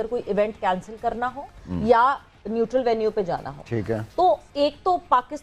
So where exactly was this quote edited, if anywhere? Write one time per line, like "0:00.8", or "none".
none